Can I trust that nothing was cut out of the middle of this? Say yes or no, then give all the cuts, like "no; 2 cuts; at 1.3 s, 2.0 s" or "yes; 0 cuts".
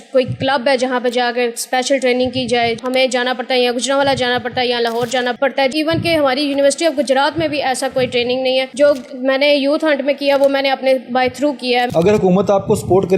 no; 4 cuts; at 2.8 s, 5.7 s, 8.7 s, 11.9 s